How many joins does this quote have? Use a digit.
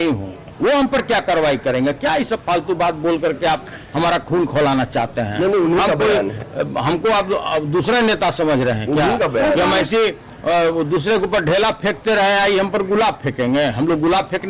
0